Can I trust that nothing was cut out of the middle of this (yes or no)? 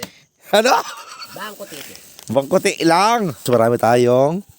no